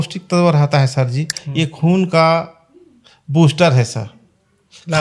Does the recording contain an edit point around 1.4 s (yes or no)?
yes